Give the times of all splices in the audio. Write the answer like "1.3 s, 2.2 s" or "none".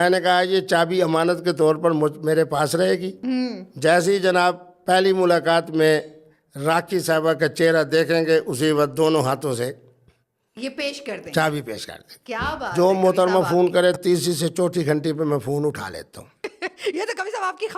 12.7 s